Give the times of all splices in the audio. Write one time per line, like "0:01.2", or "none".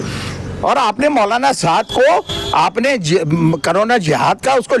none

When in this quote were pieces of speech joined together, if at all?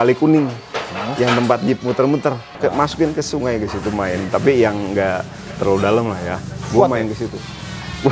0:02.5

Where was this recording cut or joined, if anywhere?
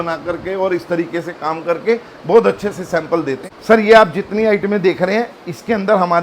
0:03.4

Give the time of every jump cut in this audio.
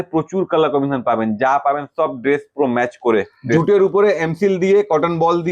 0:03.4

